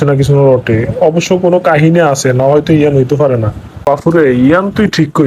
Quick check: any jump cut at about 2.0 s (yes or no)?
no